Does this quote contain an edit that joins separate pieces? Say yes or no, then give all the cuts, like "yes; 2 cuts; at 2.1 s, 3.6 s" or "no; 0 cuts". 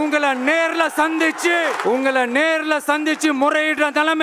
yes; 1 cut; at 1.8 s